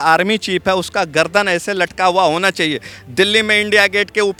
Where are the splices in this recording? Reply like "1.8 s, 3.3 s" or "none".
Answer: none